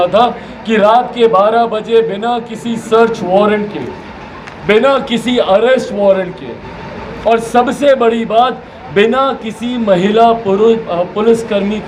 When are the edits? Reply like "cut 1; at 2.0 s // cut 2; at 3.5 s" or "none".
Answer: none